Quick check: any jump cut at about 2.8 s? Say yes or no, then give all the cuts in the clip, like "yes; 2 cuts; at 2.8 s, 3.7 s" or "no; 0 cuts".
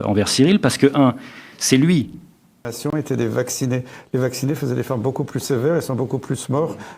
yes; 1 cut; at 2.8 s